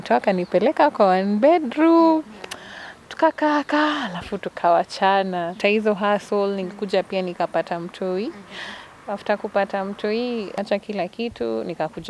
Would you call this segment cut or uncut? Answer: cut